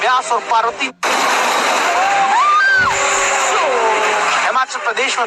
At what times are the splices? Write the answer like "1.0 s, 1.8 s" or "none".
0.9 s